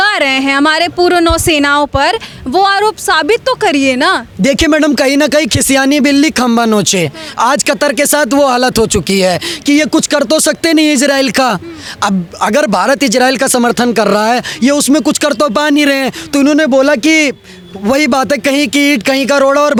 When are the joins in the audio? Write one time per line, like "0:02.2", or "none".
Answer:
none